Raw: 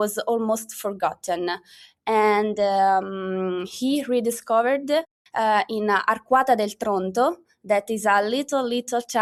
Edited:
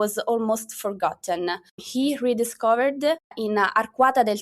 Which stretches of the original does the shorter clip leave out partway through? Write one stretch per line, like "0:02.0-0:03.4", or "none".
0:01.8-0:03.7
0:05.3-0:05.7